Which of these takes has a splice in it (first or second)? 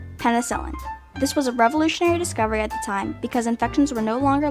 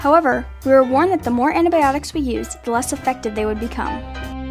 first